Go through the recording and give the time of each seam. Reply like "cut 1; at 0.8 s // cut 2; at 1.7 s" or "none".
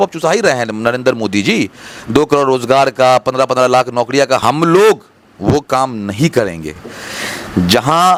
none